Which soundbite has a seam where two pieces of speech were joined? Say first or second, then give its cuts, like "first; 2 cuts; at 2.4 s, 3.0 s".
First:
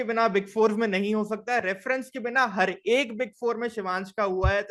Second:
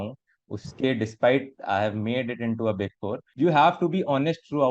second; 1 cut; at 3.2 s